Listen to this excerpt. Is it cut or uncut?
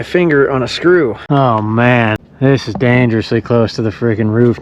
cut